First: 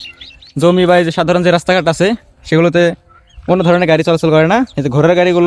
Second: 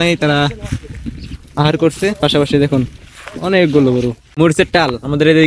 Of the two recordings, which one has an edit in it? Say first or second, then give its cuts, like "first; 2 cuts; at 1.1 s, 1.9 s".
second; 1 cut; at 4.2 s